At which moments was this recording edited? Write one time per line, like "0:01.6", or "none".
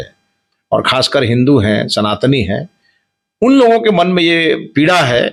none